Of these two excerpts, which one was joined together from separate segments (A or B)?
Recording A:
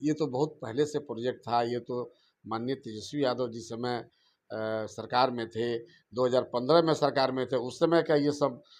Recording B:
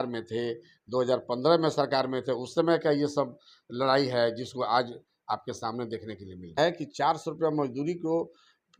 B